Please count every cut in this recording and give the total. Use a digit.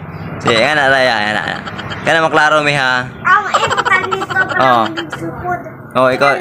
0